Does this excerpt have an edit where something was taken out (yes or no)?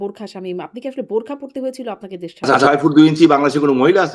yes